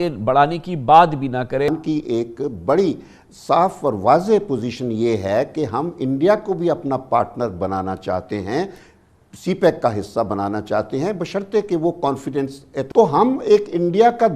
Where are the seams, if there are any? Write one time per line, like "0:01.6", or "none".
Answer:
0:01.7
0:12.7